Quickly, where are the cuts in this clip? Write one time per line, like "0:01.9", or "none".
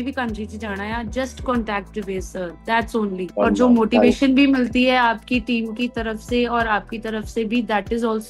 0:03.3